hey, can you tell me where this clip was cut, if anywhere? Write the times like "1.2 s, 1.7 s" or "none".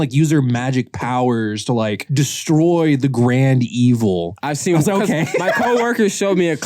2.0 s, 4.4 s